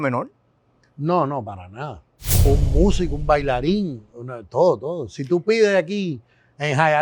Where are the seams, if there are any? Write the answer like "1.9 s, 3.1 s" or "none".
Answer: 2.5 s